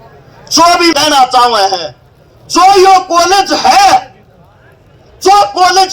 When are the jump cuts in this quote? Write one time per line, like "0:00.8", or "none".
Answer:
0:00.9